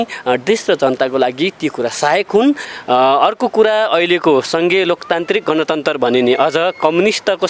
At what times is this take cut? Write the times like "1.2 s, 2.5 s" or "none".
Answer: 2.7 s